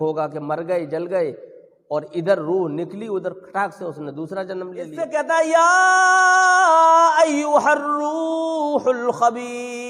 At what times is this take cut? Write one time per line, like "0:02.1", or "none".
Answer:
0:05.0